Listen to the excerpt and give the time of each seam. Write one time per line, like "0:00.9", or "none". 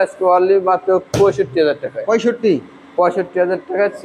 none